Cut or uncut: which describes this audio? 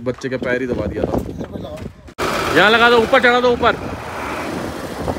uncut